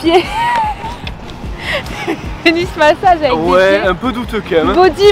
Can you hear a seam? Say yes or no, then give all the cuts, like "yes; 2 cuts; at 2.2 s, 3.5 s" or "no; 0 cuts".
no; 0 cuts